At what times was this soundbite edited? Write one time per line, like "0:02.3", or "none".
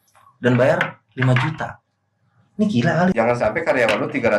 0:03.1